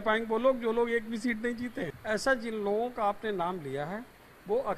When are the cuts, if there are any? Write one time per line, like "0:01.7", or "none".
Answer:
0:01.9

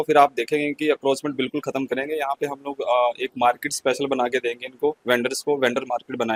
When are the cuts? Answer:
none

